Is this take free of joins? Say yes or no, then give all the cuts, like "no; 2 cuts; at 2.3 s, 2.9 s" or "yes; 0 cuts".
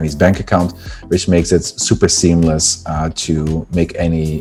yes; 0 cuts